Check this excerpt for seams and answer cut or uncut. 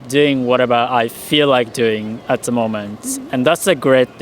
uncut